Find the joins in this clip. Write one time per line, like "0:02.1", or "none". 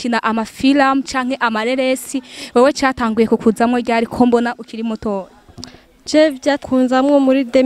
none